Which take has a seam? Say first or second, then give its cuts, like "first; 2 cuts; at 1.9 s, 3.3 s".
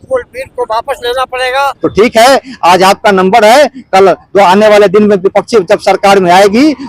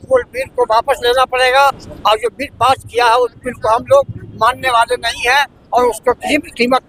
first; 1 cut; at 1.8 s